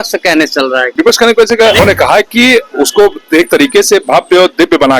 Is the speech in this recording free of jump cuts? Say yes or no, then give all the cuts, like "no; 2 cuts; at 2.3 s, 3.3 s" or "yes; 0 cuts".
no; 2 cuts; at 0.9 s, 1.8 s